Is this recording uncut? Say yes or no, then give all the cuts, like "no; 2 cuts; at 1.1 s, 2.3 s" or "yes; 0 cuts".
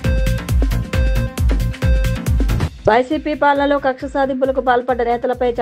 no; 1 cut; at 2.8 s